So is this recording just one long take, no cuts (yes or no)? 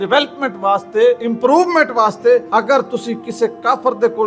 no